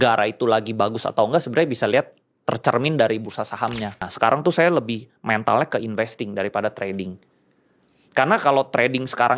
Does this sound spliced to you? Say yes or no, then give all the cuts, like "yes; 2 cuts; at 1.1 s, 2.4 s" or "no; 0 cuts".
yes; 1 cut; at 4.1 s